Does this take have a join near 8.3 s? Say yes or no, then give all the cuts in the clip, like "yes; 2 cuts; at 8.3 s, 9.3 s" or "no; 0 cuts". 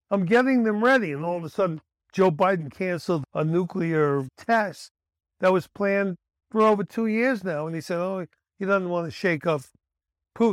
no; 1 cut; at 4.3 s